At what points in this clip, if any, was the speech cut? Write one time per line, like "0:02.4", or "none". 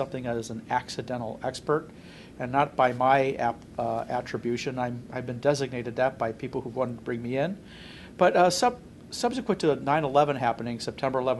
0:01.2